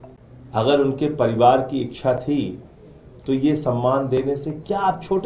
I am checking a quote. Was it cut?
no; 0 cuts

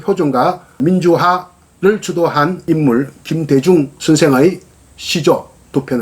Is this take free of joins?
no; 3 cuts; at 0.8 s, 2.6 s, 3.9 s

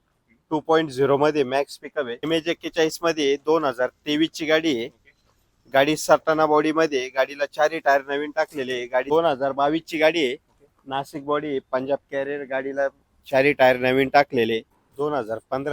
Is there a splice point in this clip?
yes; 3 cuts; at 2.3 s, 9.1 s, 14.8 s

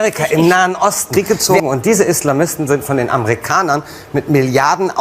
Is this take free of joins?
no; 1 cut; at 1.3 s

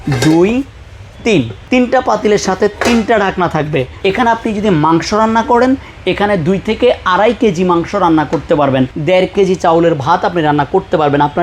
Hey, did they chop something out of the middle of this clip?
yes; 3 cuts; at 1.6 s, 3.9 s, 9.0 s

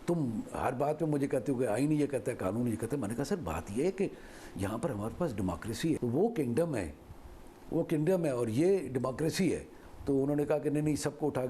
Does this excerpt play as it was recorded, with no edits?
no; 1 cut; at 6.0 s

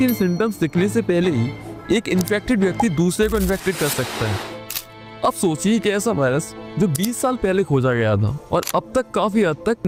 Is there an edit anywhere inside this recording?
no; 0 cuts

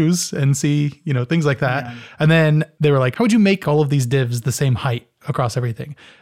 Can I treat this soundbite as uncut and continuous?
no; 2 cuts; at 2.7 s, 3.6 s

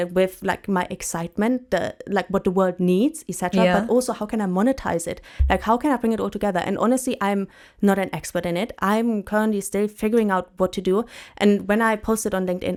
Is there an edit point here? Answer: no; 0 cuts

